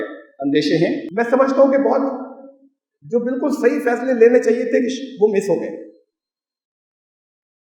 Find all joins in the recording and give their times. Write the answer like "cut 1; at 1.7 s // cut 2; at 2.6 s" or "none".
none